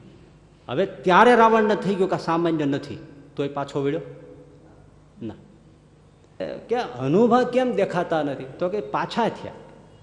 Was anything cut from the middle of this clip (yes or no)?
yes